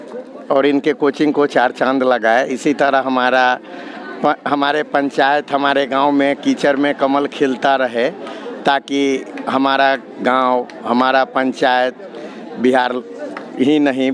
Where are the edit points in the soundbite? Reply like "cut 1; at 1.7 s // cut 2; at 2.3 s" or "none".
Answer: none